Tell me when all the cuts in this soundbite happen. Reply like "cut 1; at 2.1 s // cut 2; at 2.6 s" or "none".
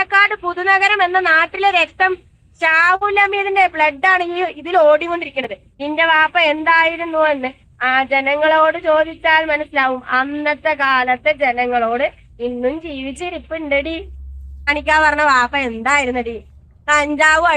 cut 1; at 5.7 s // cut 2; at 14.7 s